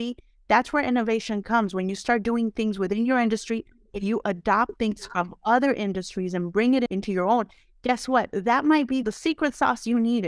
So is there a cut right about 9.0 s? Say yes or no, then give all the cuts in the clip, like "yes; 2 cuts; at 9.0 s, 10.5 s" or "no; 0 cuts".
yes; 1 cut; at 9.0 s